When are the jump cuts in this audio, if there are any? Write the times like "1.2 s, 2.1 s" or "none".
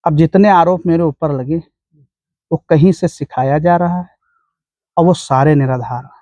none